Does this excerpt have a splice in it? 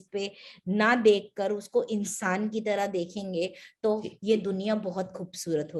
no; 0 cuts

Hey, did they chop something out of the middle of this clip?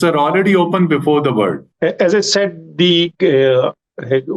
no; 0 cuts

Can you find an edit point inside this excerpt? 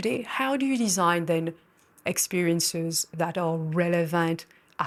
no; 0 cuts

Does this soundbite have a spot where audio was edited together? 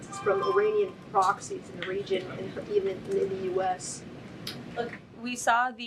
no; 0 cuts

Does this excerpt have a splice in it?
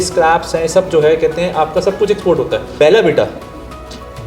yes; 1 cut; at 2.7 s

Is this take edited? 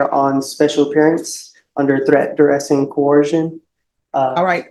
no; 0 cuts

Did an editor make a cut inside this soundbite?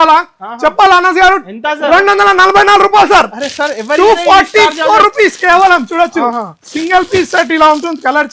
no; 0 cuts

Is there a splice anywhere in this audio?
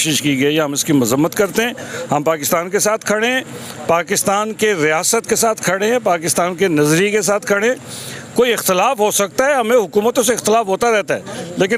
no; 0 cuts

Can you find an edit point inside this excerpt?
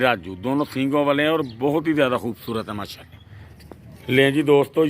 yes; 1 cut; at 3.4 s

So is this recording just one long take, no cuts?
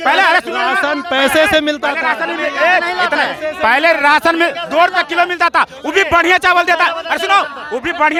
yes; 0 cuts

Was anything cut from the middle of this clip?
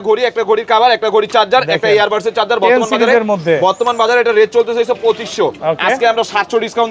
no; 0 cuts

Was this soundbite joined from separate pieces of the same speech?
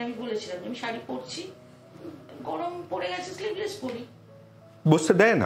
no; 0 cuts

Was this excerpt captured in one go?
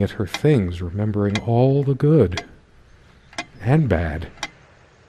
no; 1 cut; at 4.0 s

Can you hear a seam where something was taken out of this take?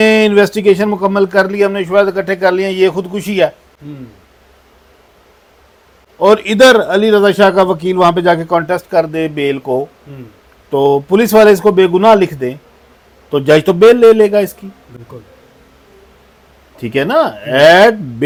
no; 0 cuts

